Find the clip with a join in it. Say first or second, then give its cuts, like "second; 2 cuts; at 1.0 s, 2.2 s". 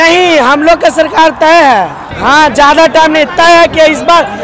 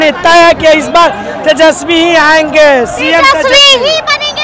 first; 1 cut; at 2.1 s